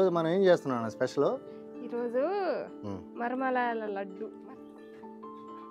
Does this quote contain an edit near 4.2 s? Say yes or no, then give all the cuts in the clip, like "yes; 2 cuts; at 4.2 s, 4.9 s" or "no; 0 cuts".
yes; 1 cut; at 4.2 s